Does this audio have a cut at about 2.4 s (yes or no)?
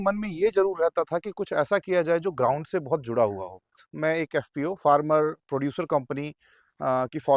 no